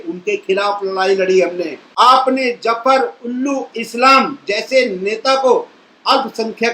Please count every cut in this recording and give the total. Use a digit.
1